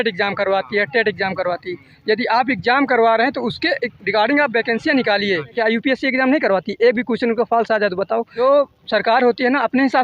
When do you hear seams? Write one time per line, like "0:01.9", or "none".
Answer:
0:05.5
0:08.3

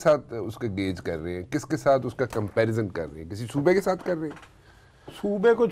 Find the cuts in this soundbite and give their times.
none

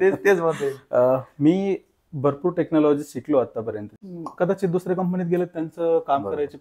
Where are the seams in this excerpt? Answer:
0:03.9

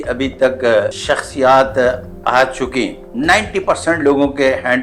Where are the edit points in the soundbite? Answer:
0:01.0
0:03.0

